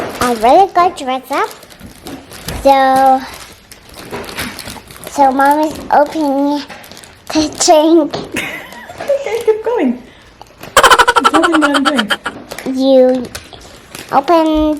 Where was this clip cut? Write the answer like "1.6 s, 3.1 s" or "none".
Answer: none